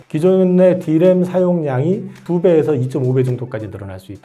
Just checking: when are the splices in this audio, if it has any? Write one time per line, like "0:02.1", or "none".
none